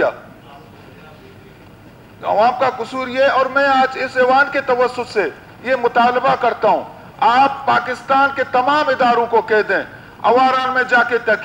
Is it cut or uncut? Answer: uncut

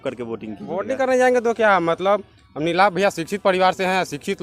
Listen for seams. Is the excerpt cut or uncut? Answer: uncut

